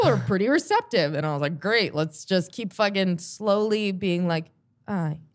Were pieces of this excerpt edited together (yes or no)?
no